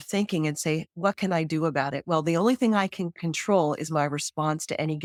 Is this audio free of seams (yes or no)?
yes